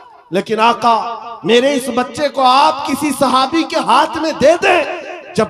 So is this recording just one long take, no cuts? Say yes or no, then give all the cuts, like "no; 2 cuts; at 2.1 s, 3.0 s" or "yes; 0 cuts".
yes; 0 cuts